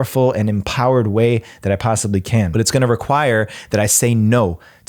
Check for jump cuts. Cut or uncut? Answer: cut